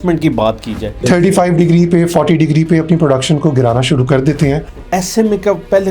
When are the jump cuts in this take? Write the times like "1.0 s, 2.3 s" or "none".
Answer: 1.0 s, 4.7 s